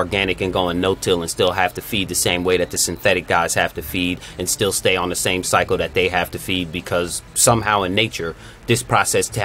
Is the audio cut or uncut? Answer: uncut